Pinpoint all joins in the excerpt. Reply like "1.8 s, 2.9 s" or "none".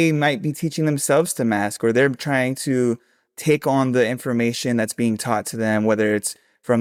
none

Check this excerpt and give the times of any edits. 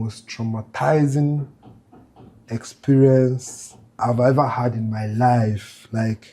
4.0 s

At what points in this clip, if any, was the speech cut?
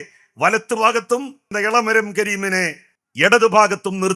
1.5 s

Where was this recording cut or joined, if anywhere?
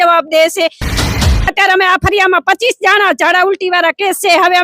1.1 s

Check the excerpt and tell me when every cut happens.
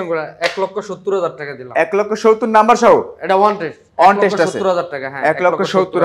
none

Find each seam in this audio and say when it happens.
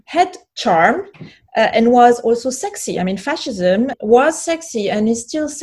3.9 s

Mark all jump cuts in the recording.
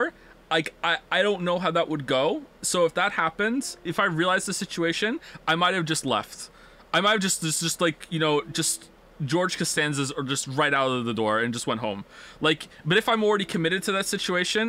2.6 s, 3.8 s, 9.7 s

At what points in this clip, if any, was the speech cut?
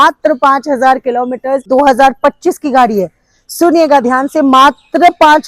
1.7 s

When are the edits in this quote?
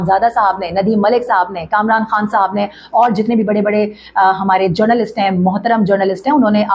none

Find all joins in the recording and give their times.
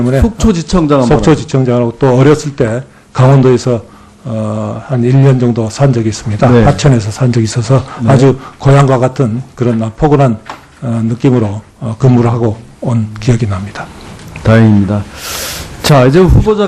12.0 s

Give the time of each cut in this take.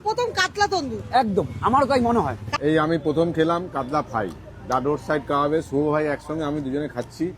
2.4 s

